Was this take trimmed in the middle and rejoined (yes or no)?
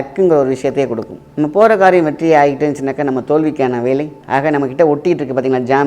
yes